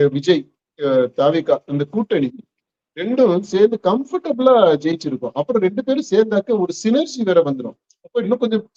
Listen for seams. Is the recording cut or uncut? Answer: uncut